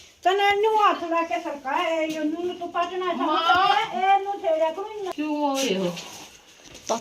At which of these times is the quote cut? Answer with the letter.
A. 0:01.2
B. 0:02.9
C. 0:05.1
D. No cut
C